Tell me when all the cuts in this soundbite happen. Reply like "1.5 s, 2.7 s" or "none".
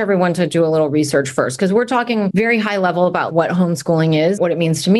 2.3 s, 3.3 s